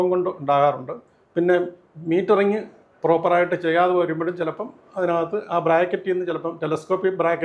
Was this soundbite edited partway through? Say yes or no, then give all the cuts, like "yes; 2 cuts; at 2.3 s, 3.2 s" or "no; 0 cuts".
no; 0 cuts